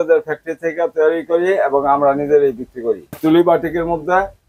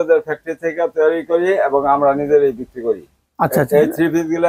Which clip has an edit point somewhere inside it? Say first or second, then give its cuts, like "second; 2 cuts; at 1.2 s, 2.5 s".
first; 1 cut; at 3.2 s